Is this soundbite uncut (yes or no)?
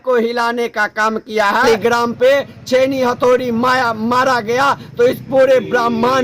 no